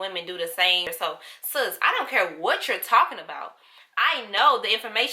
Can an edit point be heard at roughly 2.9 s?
no; 1 cut; at 0.9 s

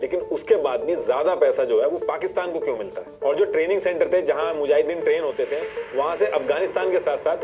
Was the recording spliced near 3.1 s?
yes; 1 cut; at 3.1 s

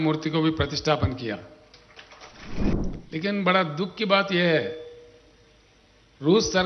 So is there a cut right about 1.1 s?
no; 1 cut; at 2.7 s

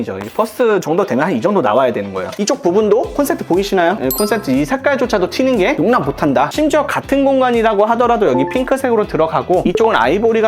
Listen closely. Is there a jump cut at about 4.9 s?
no; 2 cuts; at 2.3 s, 6.5 s

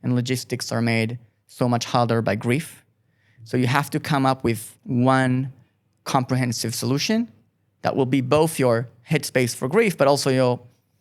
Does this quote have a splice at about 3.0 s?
no; 1 cut; at 4.7 s

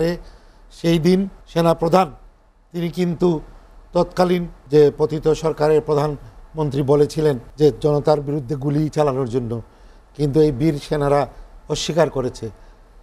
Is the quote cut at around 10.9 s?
no; 3 cuts; at 1.4 s, 4.5 s, 7.5 s

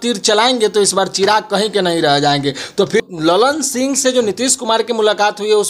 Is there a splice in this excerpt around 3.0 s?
yes; 1 cut; at 3.0 s

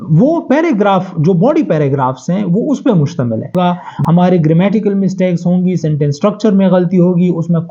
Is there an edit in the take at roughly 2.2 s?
no; 1 cut; at 3.5 s

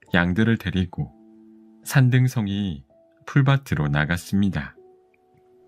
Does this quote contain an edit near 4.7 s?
yes; 1 cut; at 4.7 s

